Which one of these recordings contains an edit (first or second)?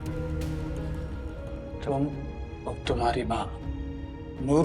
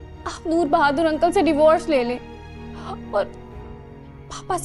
first